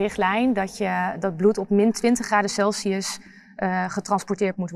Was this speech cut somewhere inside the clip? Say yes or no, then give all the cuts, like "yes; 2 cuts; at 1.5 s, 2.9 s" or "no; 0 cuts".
no; 0 cuts